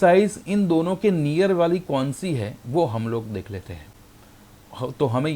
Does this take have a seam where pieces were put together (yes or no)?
no